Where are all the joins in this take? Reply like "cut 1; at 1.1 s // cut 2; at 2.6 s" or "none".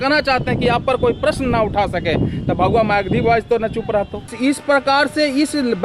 cut 1; at 4.3 s